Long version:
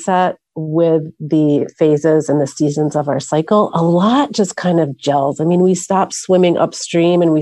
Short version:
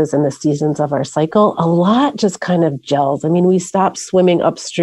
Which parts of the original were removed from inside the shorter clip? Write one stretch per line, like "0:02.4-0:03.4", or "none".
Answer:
none